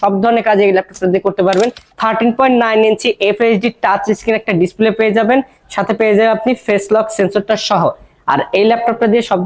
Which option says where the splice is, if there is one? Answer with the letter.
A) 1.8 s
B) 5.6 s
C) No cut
A